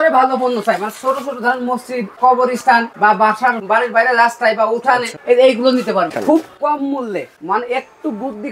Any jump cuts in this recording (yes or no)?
yes